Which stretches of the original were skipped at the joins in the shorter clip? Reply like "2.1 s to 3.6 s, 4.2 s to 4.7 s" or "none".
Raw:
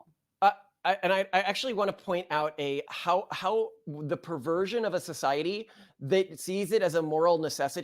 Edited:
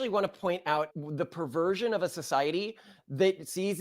2.6 s to 3.8 s